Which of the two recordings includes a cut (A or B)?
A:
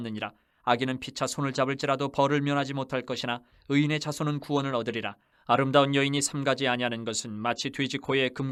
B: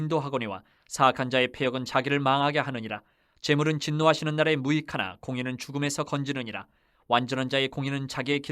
B